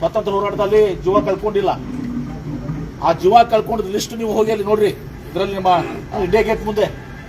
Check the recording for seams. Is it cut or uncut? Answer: cut